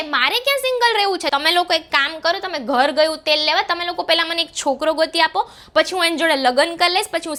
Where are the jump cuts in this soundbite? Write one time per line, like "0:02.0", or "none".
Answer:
none